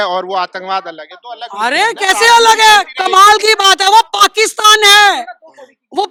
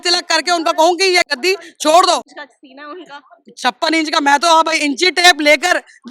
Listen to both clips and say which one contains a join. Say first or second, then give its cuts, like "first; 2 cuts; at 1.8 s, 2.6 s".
second; 1 cut; at 2.4 s